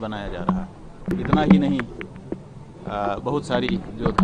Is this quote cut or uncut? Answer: cut